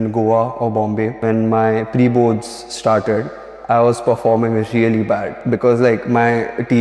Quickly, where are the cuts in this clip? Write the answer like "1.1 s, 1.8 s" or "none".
1.2 s, 5.3 s